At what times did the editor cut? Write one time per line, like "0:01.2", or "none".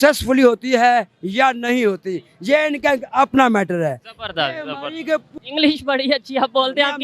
0:05.3